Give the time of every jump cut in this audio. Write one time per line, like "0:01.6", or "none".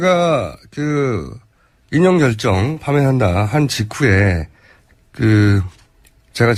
none